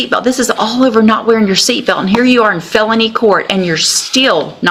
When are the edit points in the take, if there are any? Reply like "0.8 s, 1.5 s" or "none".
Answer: none